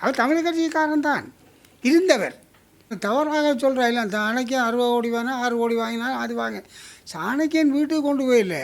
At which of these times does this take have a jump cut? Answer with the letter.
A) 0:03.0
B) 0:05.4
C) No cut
A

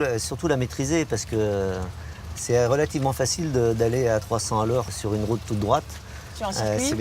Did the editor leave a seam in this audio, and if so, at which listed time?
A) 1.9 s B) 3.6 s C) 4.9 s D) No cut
B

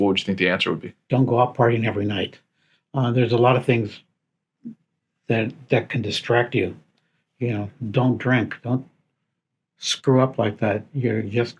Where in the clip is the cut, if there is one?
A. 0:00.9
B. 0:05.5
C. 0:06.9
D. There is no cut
A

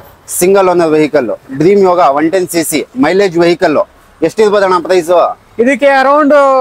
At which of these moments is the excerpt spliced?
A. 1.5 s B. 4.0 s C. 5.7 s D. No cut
D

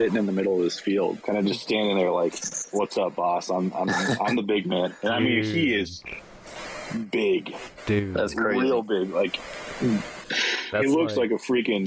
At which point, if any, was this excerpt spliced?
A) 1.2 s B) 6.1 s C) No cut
A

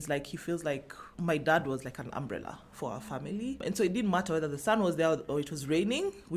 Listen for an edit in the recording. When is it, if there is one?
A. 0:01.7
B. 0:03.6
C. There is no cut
B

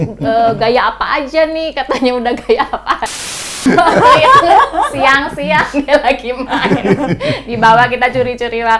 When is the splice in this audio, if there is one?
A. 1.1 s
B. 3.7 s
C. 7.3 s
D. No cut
B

